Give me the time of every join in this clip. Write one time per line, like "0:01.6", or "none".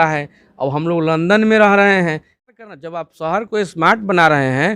0:02.7